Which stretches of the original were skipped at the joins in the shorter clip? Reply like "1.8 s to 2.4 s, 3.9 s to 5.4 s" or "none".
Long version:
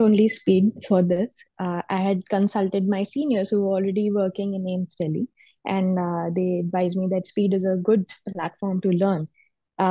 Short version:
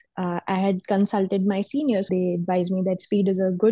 3.5 s to 6.3 s

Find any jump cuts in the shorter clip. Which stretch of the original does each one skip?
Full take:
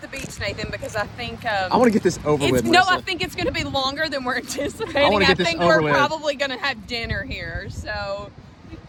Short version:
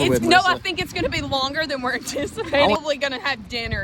5.2 s to 6.1 s

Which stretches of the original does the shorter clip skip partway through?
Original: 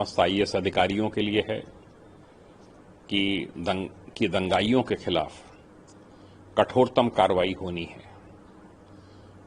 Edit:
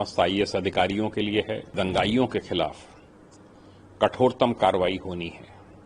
1.7 s to 4.3 s

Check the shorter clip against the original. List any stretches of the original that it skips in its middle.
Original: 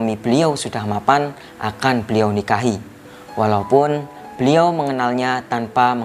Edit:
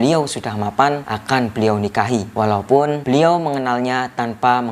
1.4 s to 1.6 s, 2.8 s to 3.3 s, 4.0 s to 4.3 s

